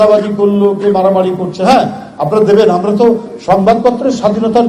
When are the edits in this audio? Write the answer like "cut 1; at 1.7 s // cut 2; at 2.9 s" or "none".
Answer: none